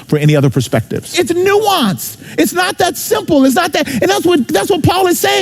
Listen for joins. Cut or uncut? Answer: cut